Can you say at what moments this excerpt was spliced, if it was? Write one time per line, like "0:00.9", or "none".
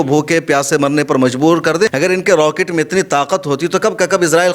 0:01.9